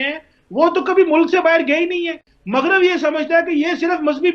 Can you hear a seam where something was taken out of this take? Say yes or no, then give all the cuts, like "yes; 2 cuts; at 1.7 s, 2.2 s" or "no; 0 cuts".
yes; 1 cut; at 2.3 s